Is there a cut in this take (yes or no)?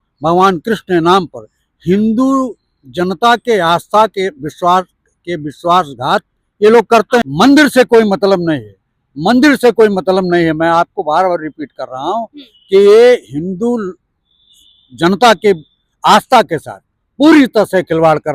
yes